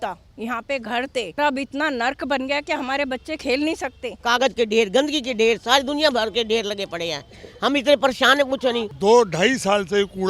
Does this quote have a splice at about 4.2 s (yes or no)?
yes